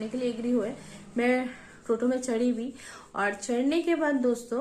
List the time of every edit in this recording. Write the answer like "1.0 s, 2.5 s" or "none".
none